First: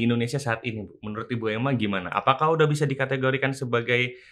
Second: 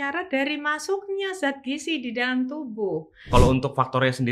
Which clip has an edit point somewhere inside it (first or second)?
second